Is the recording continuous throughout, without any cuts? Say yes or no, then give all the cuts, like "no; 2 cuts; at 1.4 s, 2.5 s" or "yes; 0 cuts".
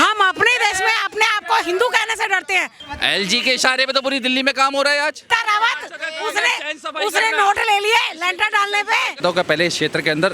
no; 3 cuts; at 2.8 s, 5.3 s, 9.2 s